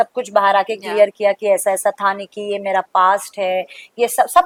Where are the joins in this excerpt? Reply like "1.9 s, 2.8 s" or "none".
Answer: none